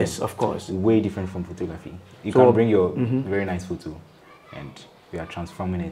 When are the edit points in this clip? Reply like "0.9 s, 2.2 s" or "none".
none